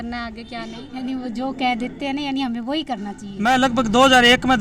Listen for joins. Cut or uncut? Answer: cut